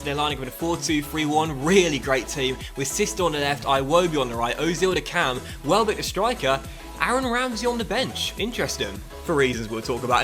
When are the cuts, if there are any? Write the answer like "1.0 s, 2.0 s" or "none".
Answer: none